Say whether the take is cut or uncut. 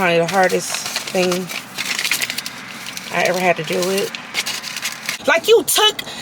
cut